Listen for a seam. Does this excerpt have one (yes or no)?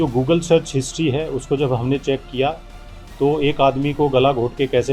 no